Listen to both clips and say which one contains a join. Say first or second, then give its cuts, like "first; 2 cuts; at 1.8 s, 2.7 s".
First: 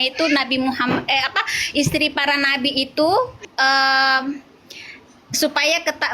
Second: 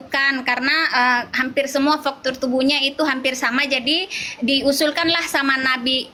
first; 1 cut; at 3.5 s